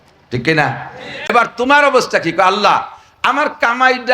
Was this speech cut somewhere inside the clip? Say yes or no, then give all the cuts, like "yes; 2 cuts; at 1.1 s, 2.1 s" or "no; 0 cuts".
yes; 1 cut; at 1.3 s